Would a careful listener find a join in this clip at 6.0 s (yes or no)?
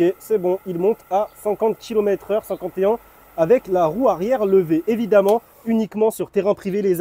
no